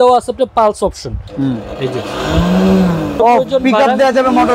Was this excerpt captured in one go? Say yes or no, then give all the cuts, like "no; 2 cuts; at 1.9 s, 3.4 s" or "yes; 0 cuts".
no; 1 cut; at 3.2 s